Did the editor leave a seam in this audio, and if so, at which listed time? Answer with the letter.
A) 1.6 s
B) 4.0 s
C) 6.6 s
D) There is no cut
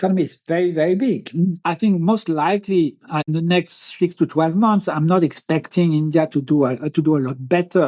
A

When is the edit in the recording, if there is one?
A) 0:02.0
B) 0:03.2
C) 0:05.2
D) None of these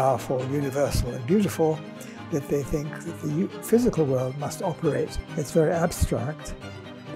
C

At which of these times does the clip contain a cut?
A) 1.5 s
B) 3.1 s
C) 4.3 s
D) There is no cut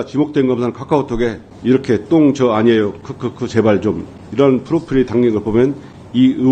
A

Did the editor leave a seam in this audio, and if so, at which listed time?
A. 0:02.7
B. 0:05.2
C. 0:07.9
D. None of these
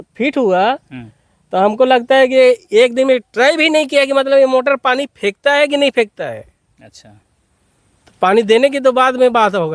D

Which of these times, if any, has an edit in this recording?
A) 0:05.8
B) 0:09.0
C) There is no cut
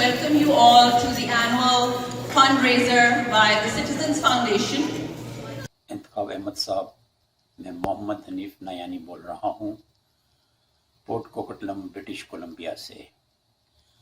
A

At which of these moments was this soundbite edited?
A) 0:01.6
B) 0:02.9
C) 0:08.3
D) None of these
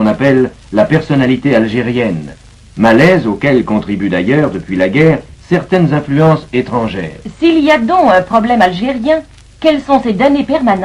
C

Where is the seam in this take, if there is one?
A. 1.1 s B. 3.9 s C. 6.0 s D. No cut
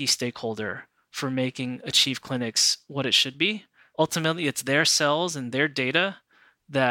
B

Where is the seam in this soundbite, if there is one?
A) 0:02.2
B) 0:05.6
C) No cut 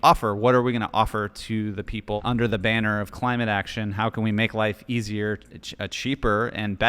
A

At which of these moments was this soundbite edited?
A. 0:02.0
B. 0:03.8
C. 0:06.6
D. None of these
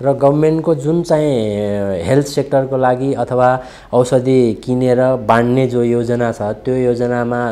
D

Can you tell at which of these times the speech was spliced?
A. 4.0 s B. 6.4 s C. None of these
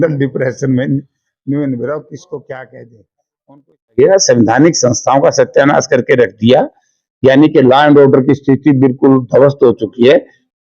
A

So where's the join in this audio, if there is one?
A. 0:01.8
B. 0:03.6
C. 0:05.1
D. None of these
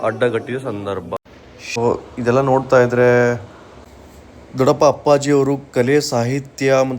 A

